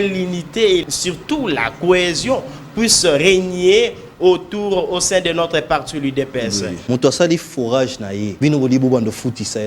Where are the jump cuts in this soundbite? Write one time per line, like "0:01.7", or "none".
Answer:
0:00.9
0:06.7
0:08.3